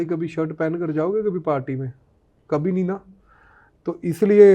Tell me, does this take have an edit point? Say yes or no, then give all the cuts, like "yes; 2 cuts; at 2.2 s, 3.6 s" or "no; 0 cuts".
no; 0 cuts